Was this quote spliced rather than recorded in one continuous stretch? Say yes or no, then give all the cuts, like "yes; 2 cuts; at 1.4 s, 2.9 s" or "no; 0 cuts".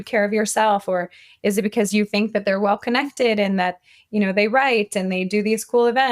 no; 0 cuts